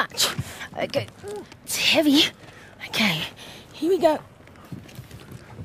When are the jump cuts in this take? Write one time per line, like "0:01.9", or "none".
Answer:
0:01.9